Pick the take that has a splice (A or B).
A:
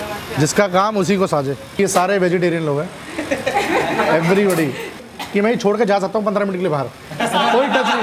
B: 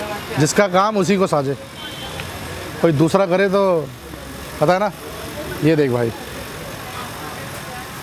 A